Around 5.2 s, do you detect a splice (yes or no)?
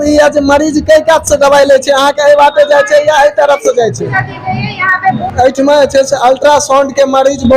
yes